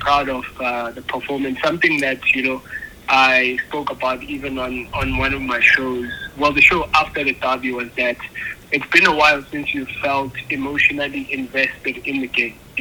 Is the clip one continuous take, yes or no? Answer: yes